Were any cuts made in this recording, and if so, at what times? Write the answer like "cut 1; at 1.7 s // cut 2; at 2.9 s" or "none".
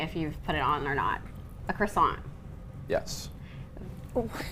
none

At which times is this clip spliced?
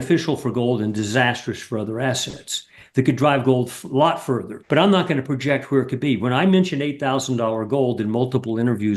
cut 1; at 4.5 s

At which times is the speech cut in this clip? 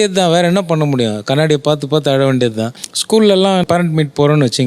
cut 1; at 3.6 s

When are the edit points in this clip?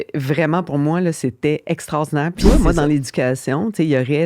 cut 1; at 2.4 s

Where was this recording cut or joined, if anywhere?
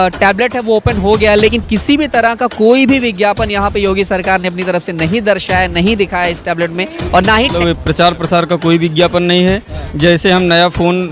cut 1; at 7.5 s

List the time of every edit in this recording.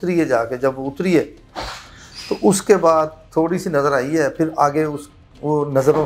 none

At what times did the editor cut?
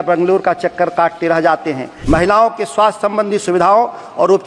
cut 1; at 1.9 s

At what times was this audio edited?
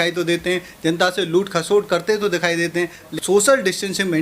cut 1; at 3.1 s

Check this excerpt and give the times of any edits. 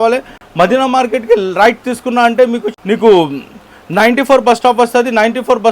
cut 1; at 2.7 s

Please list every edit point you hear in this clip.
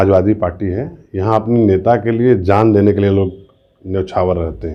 none

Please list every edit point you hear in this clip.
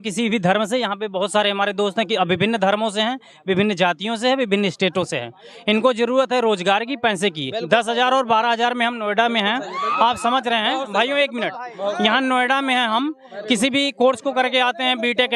none

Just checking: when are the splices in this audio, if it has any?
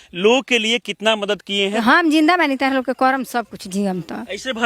cut 1; at 1.8 s

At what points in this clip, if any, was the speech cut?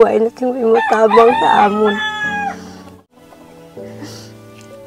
cut 1; at 2.9 s

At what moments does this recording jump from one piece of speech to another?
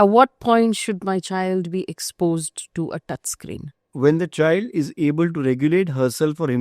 cut 1; at 3.8 s

